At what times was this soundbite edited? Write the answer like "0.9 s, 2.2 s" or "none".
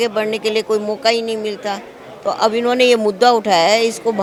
none